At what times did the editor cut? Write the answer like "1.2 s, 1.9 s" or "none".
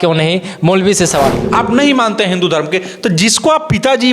1.4 s